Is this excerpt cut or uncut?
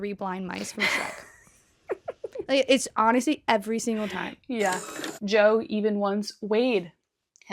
cut